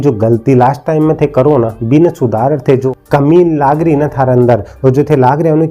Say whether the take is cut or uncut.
cut